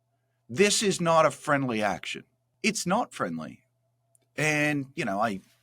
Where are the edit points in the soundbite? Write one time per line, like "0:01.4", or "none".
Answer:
0:02.5